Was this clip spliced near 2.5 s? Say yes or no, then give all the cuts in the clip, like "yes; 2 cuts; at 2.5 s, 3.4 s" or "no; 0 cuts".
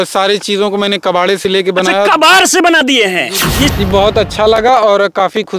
no; 1 cut; at 3.7 s